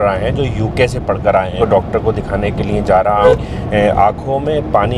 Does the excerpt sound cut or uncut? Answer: cut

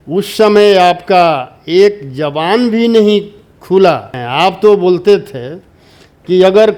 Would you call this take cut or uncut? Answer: cut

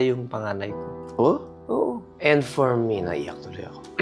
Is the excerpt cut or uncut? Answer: uncut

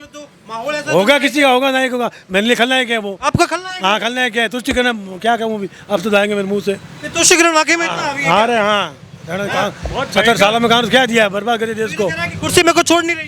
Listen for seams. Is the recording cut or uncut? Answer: uncut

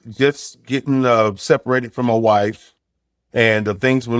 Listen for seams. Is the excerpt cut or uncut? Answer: uncut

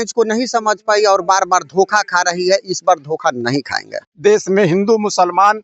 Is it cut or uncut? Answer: cut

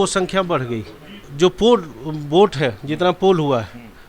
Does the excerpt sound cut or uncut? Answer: cut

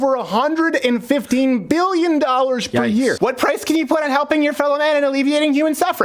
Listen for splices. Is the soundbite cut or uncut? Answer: cut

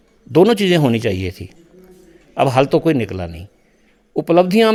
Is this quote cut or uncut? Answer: uncut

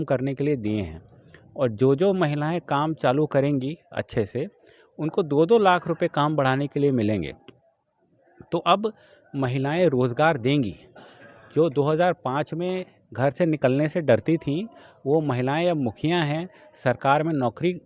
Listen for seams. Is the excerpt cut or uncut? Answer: uncut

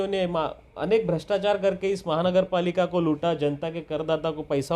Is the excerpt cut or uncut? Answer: uncut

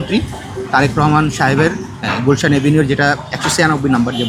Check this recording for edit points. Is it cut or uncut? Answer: uncut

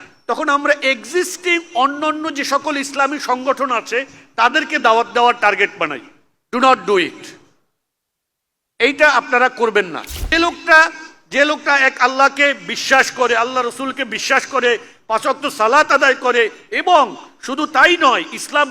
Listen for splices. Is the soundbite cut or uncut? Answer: cut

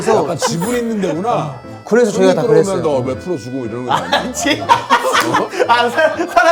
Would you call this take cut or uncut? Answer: uncut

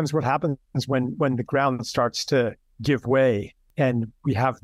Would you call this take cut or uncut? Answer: cut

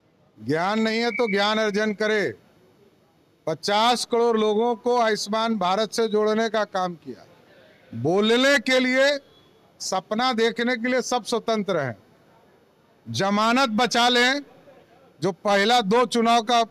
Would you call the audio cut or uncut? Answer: uncut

